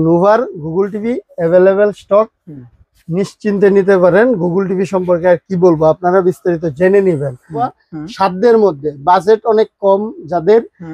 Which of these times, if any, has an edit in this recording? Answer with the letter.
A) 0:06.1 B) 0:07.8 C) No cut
B